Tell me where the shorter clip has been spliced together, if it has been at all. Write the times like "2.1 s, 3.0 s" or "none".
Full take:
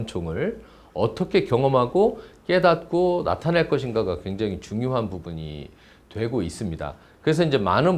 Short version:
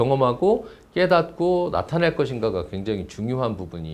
none